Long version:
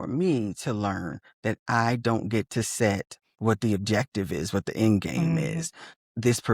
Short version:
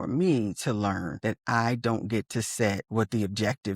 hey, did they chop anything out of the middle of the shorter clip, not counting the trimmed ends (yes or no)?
yes